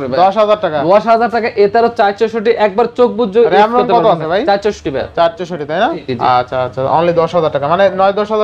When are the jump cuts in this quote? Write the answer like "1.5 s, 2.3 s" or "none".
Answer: none